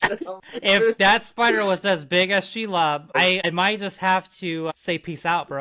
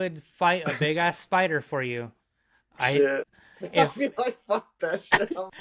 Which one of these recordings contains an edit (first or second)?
first